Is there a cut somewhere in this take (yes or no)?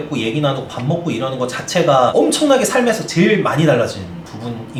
no